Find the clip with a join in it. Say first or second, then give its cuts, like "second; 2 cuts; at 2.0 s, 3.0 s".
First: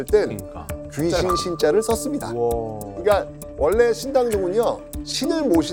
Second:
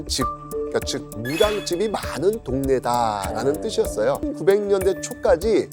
second; 1 cut; at 4.2 s